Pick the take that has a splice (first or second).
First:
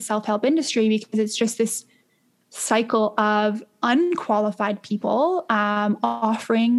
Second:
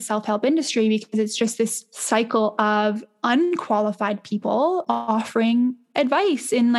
second